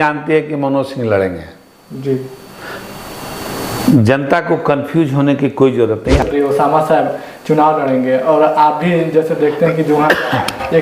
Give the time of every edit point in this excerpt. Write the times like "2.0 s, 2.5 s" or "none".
6.2 s